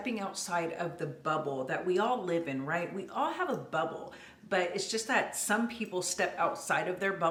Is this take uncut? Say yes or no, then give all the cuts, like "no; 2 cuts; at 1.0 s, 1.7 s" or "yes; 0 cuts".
yes; 0 cuts